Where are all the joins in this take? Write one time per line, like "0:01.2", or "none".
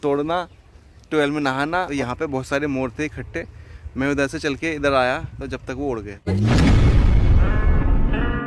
0:01.9
0:06.1

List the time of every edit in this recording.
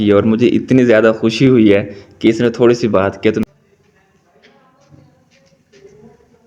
0:03.4

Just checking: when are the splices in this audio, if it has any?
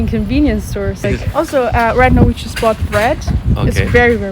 0:01.1

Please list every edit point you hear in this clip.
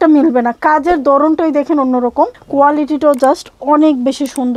0:02.4

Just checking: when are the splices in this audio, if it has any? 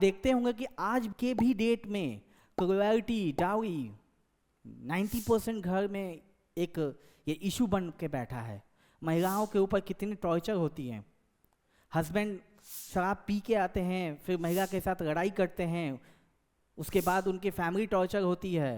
0:01.1

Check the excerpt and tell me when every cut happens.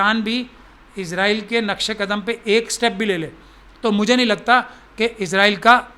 none

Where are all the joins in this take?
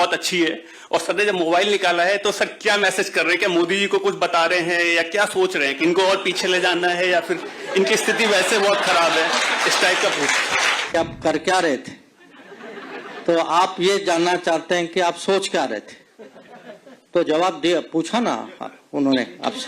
0:10.9

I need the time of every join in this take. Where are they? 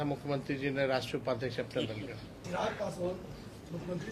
0:02.4

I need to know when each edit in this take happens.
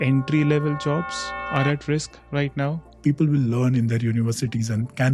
0:02.9

